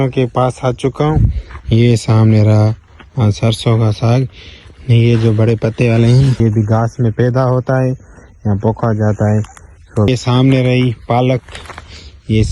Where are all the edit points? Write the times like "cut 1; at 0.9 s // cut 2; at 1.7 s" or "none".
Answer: cut 1; at 6.4 s // cut 2; at 10.1 s